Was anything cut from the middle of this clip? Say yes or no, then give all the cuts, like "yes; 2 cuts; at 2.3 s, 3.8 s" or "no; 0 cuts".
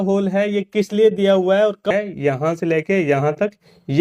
yes; 1 cut; at 1.9 s